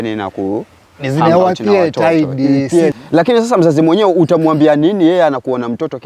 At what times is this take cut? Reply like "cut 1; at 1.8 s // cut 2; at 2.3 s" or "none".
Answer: cut 1; at 3.0 s

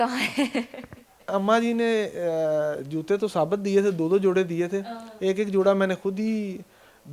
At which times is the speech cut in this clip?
cut 1; at 1.3 s

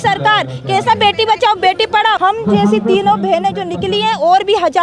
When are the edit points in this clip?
cut 1; at 2.2 s

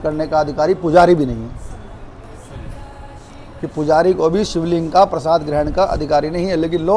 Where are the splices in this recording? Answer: none

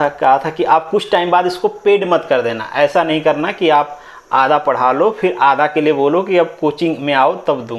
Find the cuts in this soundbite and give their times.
none

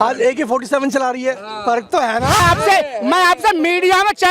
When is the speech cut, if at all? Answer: cut 1; at 2.4 s

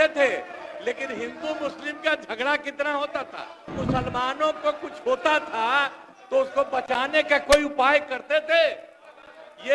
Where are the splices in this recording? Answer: cut 1; at 3.8 s

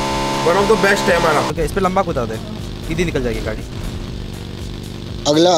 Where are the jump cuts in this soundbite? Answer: cut 1; at 1.5 s // cut 2; at 3.7 s

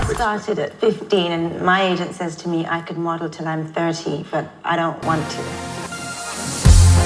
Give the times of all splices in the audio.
cut 1; at 5.4 s

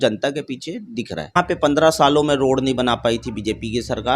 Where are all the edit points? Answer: cut 1; at 1.3 s

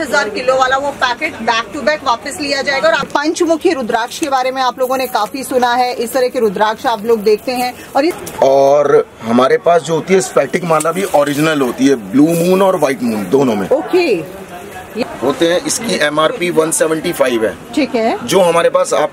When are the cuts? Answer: cut 1; at 3.1 s // cut 2; at 8.2 s // cut 3; at 14.9 s

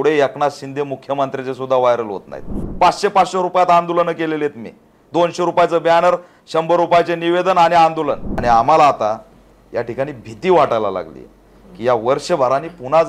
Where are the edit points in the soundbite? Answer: cut 1; at 2.6 s // cut 2; at 8.3 s

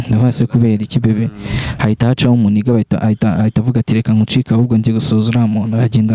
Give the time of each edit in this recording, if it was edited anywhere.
none

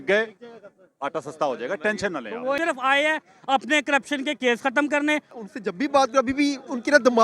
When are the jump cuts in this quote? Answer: cut 1; at 2.6 s // cut 2; at 5.3 s

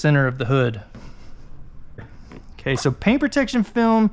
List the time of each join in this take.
cut 1; at 2.2 s

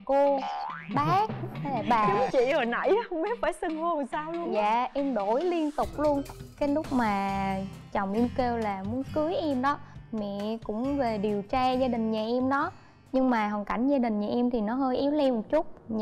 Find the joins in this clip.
cut 1; at 6.4 s

